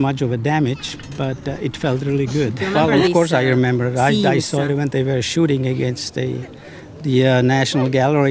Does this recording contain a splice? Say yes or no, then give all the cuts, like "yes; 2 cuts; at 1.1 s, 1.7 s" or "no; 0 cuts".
yes; 1 cut; at 2.6 s